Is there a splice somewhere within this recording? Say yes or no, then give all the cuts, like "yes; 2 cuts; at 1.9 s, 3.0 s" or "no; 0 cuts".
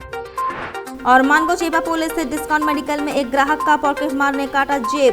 yes; 1 cut; at 0.9 s